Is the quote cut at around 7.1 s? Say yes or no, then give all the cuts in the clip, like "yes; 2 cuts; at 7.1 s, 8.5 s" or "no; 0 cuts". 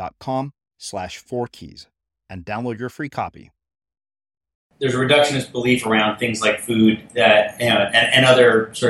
no; 1 cut; at 4.6 s